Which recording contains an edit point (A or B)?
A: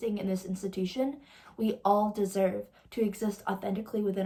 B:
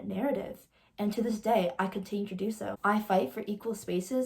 B